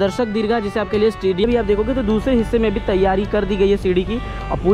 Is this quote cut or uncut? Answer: cut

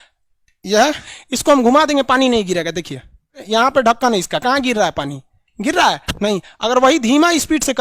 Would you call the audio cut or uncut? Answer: cut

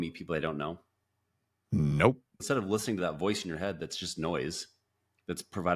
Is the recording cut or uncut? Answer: cut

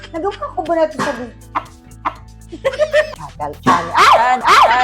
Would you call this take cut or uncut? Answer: cut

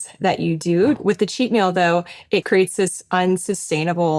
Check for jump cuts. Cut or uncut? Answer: cut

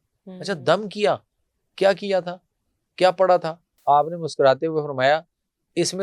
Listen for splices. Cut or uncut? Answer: cut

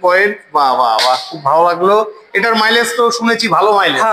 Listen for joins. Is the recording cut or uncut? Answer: uncut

